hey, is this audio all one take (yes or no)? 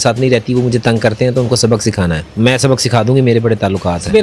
no